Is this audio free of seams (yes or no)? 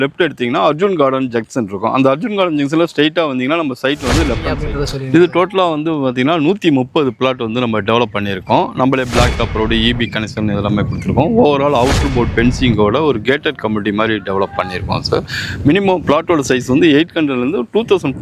no